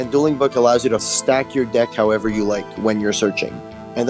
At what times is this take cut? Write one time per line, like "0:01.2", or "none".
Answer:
0:01.0